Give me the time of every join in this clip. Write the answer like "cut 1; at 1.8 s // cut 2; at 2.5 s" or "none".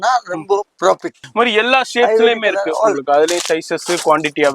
cut 1; at 1.2 s